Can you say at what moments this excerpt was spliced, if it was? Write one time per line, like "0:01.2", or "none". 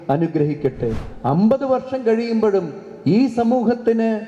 0:01.1